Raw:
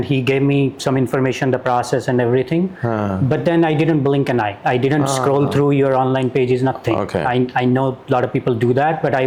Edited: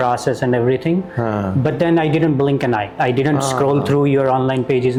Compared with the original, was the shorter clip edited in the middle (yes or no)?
no